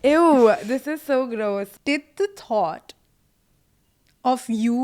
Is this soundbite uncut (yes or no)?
no